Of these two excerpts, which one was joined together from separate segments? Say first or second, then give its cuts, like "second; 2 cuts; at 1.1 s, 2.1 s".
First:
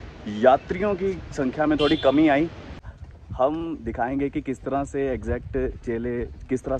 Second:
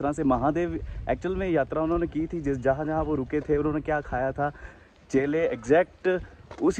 first; 1 cut; at 2.8 s